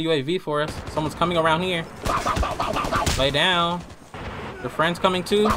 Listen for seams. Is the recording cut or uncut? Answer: uncut